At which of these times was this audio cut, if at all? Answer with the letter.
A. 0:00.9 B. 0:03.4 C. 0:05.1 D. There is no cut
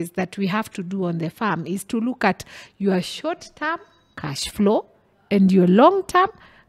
D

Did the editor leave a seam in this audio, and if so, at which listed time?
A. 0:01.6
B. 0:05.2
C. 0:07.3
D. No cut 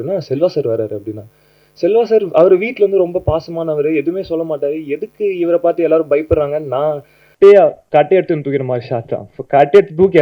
C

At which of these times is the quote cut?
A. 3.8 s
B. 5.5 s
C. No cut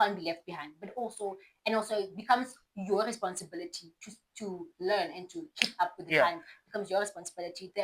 C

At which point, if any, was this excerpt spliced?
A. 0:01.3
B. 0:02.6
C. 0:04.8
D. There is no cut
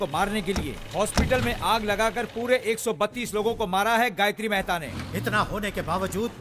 C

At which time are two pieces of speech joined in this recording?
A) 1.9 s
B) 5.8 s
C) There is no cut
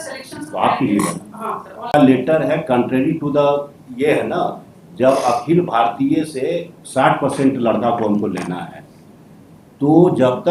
A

